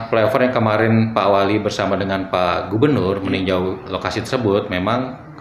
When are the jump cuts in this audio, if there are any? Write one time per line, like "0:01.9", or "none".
none

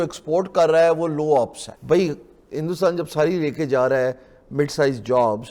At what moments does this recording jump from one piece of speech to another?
0:01.7

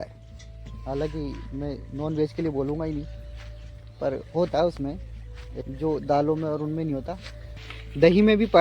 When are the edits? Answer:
0:07.7

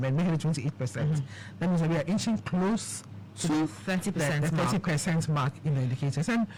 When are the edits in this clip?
none

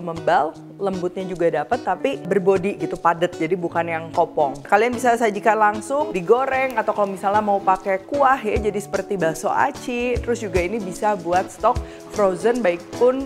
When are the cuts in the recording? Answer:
0:02.3
0:04.6
0:06.1

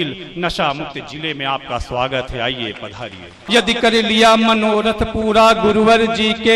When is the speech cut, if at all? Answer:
0:03.4

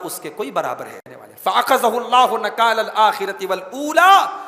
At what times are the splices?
0:01.1

